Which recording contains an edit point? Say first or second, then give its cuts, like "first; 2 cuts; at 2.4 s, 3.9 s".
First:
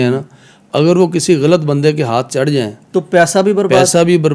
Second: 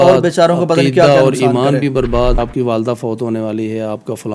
second; 1 cut; at 2.4 s